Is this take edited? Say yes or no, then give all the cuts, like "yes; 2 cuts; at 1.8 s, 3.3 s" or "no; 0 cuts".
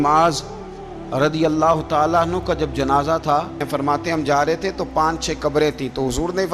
yes; 1 cut; at 3.7 s